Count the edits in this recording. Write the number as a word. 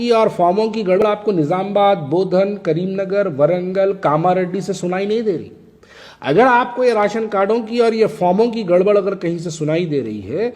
one